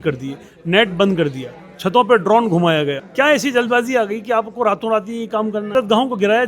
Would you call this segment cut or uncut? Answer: cut